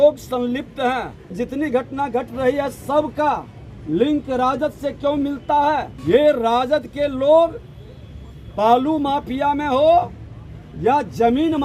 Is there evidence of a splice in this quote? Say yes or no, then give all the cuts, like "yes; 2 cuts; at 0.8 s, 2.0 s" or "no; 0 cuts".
yes; 2 cuts; at 1.3 s, 5.9 s